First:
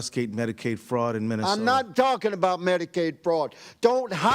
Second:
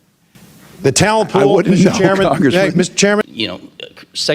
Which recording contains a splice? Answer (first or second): second